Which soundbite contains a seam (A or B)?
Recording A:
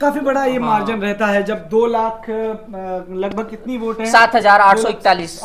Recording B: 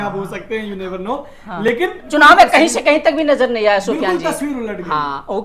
B